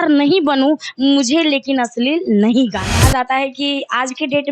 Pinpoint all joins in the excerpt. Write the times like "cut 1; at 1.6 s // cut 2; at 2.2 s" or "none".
cut 1; at 2.9 s